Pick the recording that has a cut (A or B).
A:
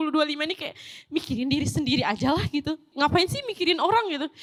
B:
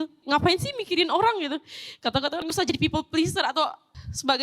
B